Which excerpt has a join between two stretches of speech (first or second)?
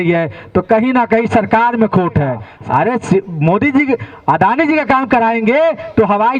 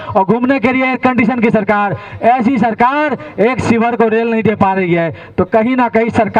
first